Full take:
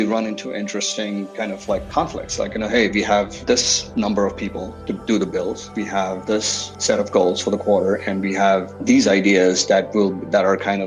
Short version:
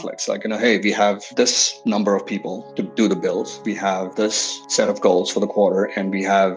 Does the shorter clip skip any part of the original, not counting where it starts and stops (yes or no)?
no